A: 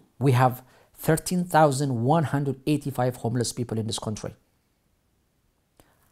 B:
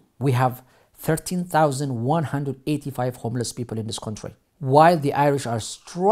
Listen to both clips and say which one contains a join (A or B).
B